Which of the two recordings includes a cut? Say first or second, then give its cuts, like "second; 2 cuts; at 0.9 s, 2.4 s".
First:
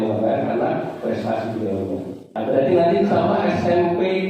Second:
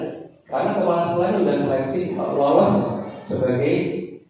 first; 1 cut; at 2.3 s